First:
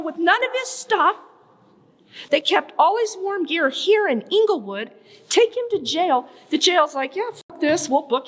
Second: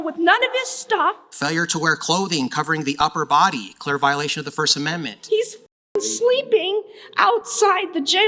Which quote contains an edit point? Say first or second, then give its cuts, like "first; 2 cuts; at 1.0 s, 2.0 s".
second; 2 cuts; at 1.3 s, 5.1 s